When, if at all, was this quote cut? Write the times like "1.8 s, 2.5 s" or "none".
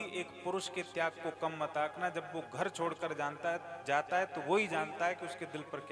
none